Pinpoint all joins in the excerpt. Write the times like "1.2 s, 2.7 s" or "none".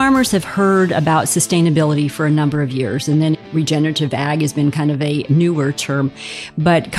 3.4 s, 5.3 s